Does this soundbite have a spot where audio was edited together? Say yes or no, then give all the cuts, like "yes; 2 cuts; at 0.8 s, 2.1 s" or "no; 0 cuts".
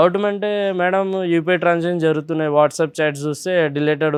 no; 0 cuts